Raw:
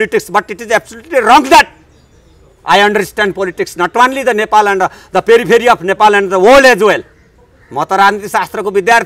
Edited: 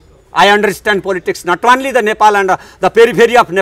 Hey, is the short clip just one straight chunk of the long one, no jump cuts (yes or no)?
yes